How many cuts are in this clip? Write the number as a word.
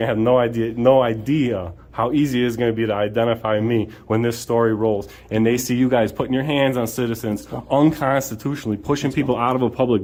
zero